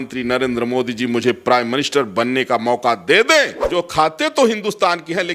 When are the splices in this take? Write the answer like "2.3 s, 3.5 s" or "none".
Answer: 3.6 s